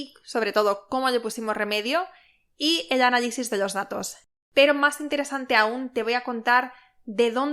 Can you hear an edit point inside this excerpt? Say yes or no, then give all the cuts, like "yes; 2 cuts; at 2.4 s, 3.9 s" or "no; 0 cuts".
yes; 1 cut; at 4.2 s